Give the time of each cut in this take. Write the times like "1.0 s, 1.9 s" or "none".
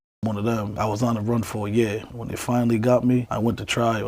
0.7 s, 2.1 s